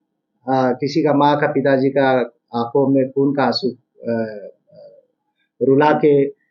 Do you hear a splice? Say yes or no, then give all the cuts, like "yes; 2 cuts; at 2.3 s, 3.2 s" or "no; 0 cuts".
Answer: no; 0 cuts